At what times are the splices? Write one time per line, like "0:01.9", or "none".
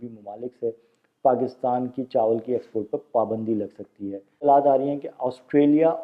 0:04.4